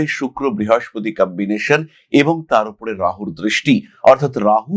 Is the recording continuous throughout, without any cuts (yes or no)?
yes